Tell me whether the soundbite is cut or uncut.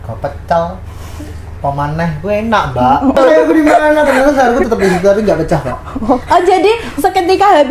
cut